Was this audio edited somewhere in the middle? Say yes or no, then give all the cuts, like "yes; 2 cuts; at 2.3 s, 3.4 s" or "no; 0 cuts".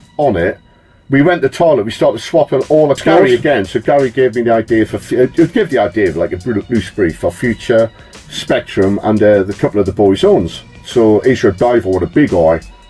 yes; 1 cut; at 3.3 s